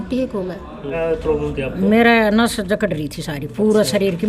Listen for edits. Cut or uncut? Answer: cut